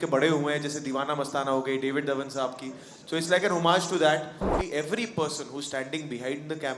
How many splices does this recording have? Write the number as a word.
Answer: one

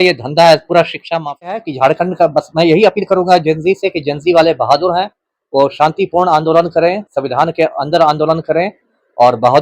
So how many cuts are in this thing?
one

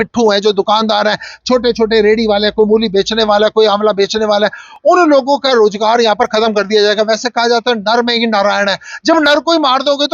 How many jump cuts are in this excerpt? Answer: zero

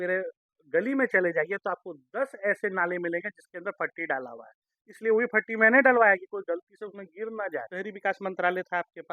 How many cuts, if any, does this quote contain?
one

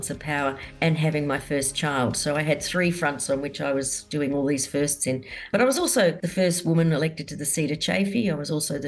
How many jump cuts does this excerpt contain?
two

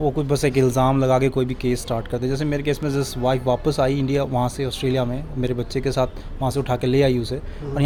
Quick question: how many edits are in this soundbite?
zero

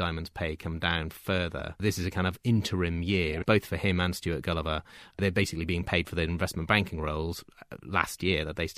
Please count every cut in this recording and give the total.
zero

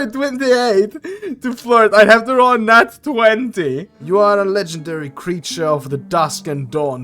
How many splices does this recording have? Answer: one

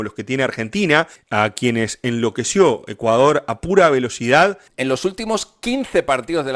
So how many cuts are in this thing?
two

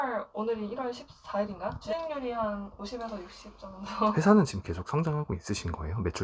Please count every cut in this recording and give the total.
one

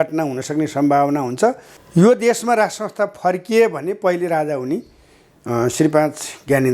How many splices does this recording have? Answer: one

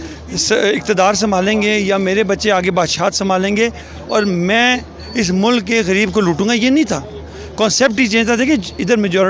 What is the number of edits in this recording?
zero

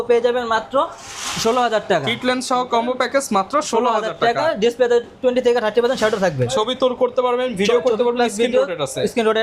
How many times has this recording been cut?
zero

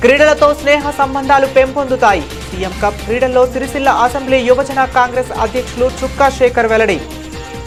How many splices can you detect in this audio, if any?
zero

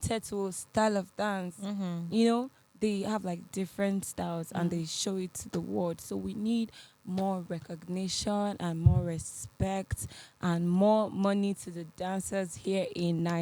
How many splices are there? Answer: zero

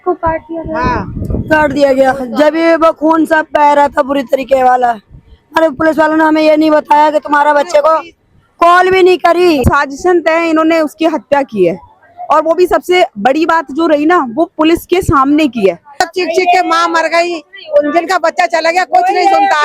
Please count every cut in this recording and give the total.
two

